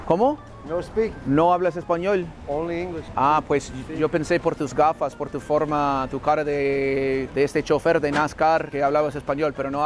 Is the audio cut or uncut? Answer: uncut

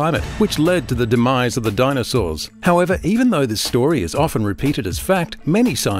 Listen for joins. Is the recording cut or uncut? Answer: cut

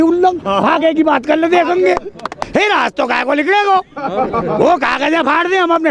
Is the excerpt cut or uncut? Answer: cut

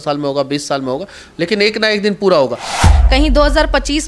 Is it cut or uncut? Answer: cut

